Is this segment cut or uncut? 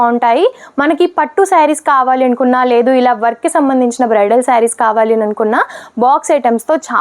uncut